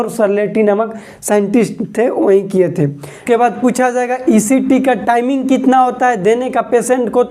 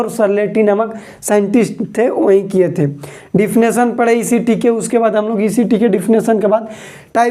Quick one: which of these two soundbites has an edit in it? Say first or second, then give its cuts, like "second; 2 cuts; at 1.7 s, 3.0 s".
first; 1 cut; at 3.2 s